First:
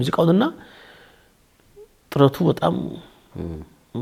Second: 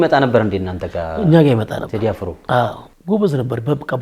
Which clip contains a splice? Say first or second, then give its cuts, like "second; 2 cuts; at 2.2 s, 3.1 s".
second; 1 cut; at 2.9 s